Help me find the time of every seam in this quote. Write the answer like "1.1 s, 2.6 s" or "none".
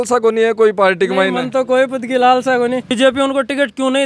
2.9 s